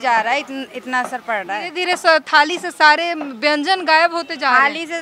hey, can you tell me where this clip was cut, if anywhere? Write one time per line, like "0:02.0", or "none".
0:01.7